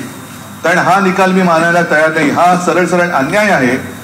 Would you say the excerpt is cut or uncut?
uncut